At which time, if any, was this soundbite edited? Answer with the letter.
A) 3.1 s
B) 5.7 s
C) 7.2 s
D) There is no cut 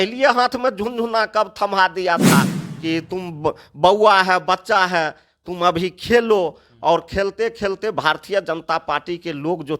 D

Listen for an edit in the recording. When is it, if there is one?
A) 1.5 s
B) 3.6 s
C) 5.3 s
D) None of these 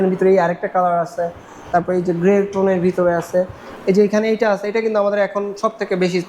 B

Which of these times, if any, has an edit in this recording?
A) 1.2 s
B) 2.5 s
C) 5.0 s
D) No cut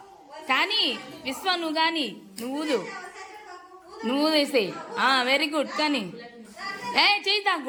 D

